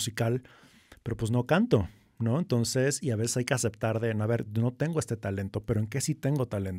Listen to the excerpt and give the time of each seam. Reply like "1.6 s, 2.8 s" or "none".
none